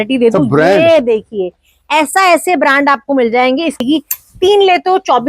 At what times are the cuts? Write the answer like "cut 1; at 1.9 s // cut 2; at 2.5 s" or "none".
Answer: cut 1; at 3.8 s

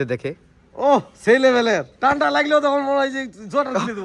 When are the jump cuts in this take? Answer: cut 1; at 1.9 s

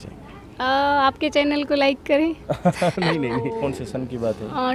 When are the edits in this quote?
cut 1; at 3.5 s

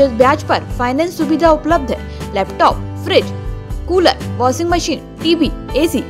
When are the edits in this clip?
none

